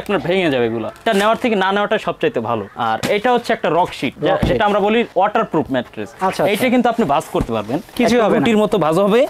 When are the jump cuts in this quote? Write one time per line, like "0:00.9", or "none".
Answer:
none